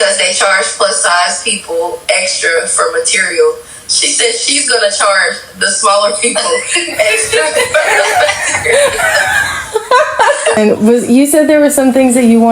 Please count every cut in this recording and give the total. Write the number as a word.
one